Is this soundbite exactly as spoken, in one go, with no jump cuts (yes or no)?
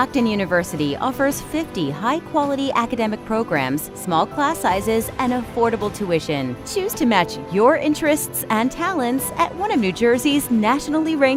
yes